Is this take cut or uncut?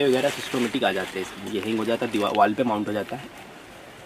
uncut